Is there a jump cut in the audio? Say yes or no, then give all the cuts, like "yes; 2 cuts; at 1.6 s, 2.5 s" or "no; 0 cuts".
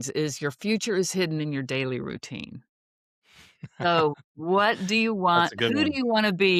no; 0 cuts